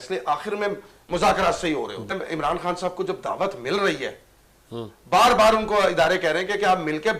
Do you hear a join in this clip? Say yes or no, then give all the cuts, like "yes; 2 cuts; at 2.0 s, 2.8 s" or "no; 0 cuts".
yes; 1 cut; at 2.1 s